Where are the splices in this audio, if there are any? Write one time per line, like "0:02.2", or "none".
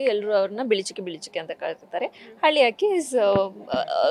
none